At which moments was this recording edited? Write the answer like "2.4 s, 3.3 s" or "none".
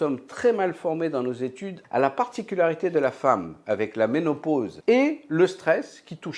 1.8 s, 4.7 s